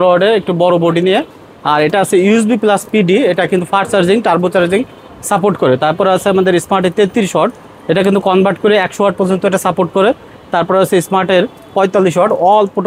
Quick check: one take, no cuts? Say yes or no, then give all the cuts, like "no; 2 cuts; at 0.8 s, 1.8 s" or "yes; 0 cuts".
yes; 0 cuts